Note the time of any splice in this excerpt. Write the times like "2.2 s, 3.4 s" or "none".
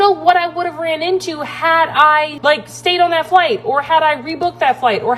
2.3 s